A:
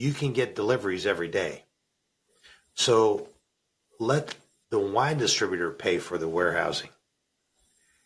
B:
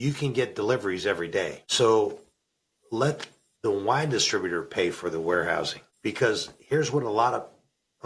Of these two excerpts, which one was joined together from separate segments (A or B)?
B